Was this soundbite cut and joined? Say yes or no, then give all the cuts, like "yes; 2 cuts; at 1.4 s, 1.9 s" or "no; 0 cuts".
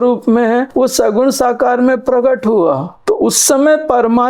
no; 0 cuts